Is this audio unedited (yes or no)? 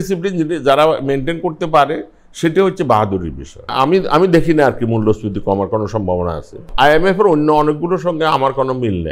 no